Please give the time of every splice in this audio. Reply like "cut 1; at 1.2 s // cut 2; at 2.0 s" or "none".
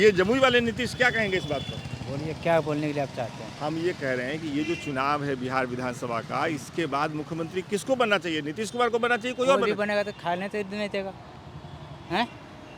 none

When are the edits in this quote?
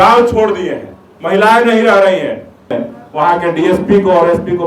cut 1; at 2.8 s

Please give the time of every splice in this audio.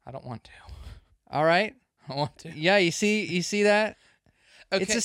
none

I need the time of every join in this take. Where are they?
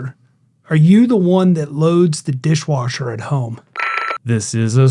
cut 1; at 3.8 s

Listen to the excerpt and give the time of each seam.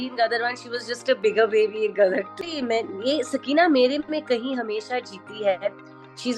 cut 1; at 2.3 s

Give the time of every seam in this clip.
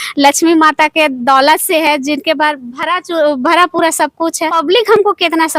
cut 1; at 4.6 s

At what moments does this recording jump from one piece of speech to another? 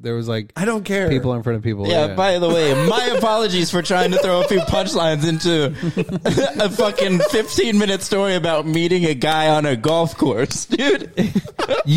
none

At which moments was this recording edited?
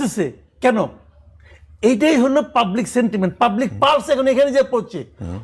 none

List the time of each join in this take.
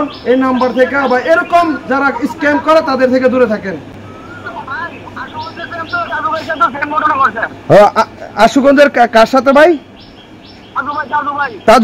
none

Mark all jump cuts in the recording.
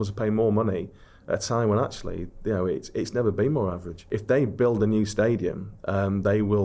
cut 1; at 4.0 s

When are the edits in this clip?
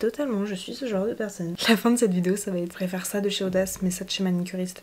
cut 1; at 1.3 s // cut 2; at 2.7 s

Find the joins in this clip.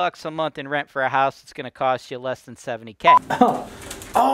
cut 1; at 2.9 s

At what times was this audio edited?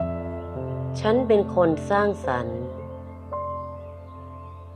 cut 1; at 0.9 s

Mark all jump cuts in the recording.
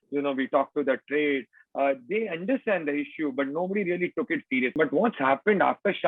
cut 1; at 4.7 s

